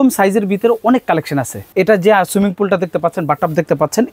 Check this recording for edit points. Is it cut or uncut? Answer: cut